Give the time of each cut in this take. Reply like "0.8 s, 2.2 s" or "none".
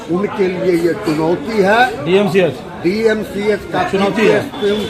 none